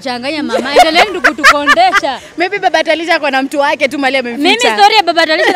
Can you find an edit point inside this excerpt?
no; 0 cuts

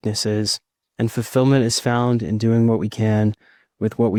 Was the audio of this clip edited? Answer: no; 0 cuts

